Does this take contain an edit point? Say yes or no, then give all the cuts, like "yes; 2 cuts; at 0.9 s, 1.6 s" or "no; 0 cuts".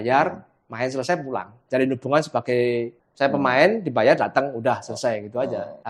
yes; 2 cuts; at 1.5 s, 3.0 s